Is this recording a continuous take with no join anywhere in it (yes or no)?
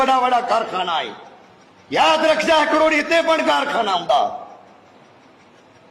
yes